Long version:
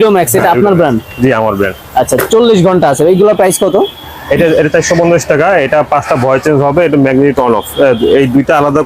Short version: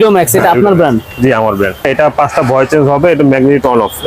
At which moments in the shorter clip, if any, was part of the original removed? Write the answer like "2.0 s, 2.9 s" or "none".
1.9 s